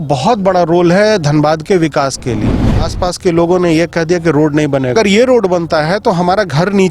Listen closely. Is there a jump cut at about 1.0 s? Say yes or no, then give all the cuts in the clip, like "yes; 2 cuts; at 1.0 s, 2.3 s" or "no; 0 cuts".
no; 2 cuts; at 2.9 s, 4.9 s